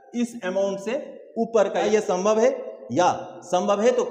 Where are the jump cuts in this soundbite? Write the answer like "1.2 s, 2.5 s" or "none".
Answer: 1.9 s